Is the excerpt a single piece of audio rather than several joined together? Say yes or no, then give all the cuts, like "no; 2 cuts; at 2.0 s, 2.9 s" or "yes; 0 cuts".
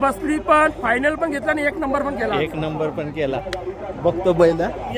yes; 0 cuts